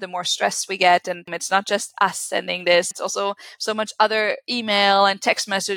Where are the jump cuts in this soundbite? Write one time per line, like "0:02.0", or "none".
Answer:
0:01.4
0:02.9